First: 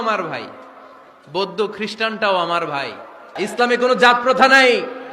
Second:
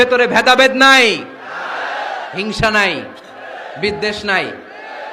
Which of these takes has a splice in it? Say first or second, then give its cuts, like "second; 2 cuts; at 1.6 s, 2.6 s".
first; 1 cut; at 3.3 s